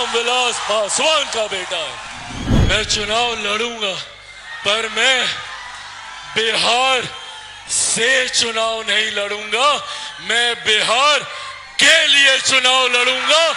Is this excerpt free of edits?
no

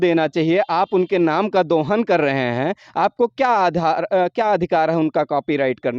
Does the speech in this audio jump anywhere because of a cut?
no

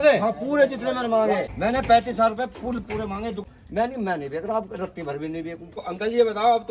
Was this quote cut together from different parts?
yes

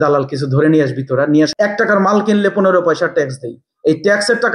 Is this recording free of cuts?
no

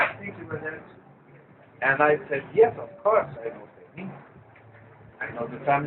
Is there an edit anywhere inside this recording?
no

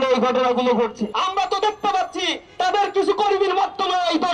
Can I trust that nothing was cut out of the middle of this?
no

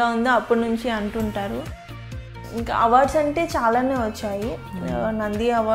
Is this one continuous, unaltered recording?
no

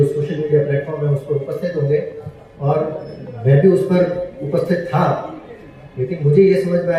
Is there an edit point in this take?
no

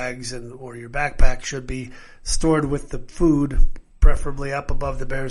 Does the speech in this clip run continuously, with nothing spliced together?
yes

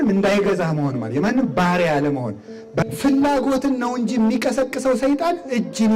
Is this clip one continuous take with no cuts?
no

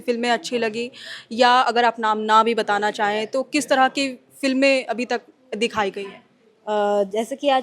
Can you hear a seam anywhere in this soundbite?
no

